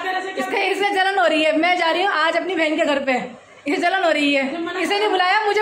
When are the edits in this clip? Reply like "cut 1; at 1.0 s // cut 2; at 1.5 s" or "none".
none